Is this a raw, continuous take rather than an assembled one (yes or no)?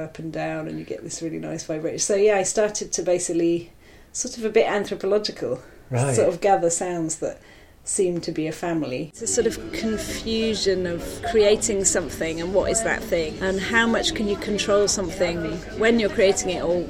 no